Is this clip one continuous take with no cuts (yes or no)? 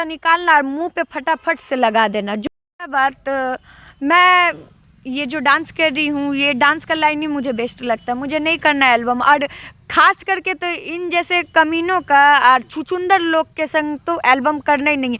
yes